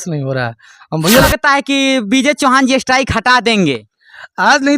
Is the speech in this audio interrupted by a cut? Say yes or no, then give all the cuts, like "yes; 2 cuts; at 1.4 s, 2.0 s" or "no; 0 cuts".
yes; 1 cut; at 1.3 s